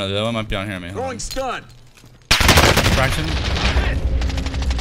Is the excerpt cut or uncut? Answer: uncut